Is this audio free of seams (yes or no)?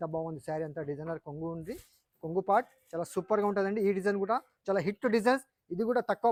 yes